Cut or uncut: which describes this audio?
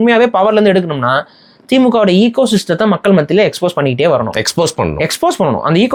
uncut